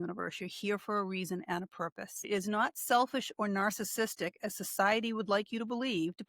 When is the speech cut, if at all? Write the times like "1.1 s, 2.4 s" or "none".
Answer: 2.2 s